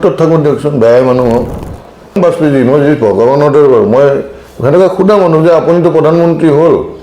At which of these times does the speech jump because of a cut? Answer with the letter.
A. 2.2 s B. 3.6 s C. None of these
A